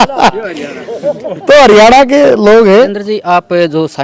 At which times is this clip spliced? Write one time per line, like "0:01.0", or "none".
none